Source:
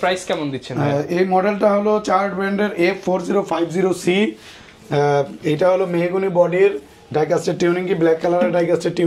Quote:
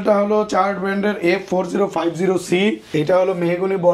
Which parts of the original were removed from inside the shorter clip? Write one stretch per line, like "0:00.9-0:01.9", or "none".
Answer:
0:04.4-0:05.4